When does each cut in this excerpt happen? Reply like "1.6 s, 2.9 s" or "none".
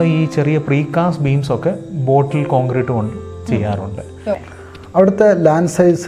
4.5 s